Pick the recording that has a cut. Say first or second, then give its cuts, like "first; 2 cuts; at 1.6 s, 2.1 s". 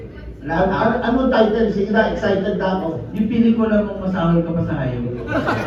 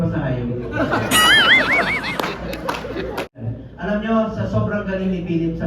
second; 1 cut; at 3.4 s